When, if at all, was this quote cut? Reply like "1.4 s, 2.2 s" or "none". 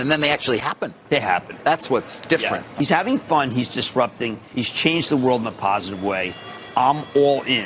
0.9 s, 2.7 s, 4.4 s